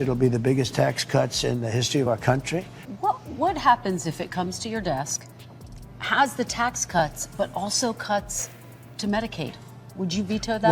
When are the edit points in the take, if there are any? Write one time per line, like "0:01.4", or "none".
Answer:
0:02.9